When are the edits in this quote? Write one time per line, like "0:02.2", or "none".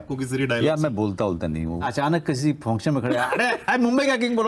0:01.8
0:03.6